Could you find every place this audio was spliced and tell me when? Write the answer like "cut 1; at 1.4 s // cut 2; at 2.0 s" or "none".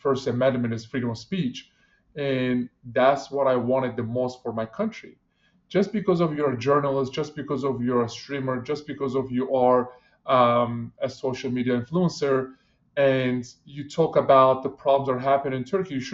none